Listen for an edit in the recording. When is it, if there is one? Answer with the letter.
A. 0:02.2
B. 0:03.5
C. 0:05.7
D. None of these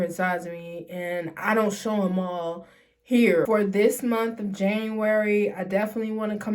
B